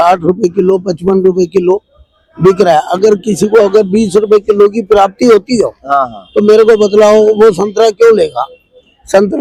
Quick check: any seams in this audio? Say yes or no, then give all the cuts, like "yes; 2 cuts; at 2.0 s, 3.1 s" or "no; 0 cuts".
no; 0 cuts